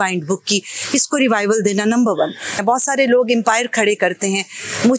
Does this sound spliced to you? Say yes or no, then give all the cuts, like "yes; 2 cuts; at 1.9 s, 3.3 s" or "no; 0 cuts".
yes; 1 cut; at 2.5 s